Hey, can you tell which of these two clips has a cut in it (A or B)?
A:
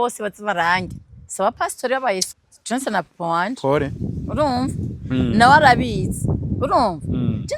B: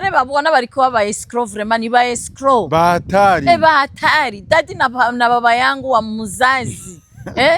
A